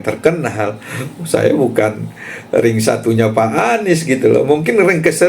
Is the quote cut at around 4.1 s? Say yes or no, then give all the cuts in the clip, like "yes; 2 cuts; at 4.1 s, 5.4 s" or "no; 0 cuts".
no; 0 cuts